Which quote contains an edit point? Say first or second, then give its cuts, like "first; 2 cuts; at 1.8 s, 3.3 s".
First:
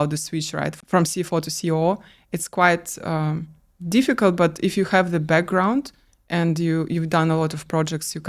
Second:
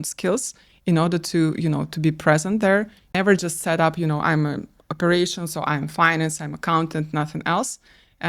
second; 1 cut; at 3.2 s